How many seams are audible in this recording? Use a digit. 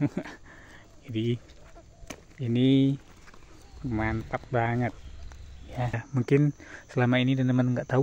1